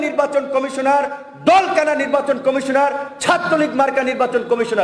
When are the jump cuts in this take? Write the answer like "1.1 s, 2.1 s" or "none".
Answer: none